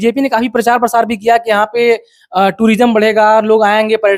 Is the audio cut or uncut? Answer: uncut